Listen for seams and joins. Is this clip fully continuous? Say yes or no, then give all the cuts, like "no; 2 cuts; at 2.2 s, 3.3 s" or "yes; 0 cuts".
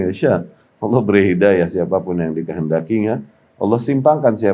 yes; 0 cuts